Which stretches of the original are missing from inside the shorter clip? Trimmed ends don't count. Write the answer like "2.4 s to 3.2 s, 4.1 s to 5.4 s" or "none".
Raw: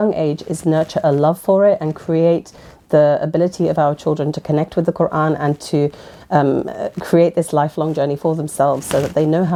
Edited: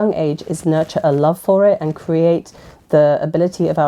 none